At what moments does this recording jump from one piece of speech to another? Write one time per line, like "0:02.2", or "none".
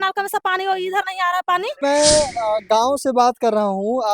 0:01.8